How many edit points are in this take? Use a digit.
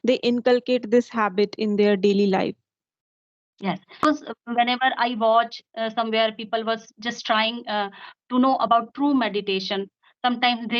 1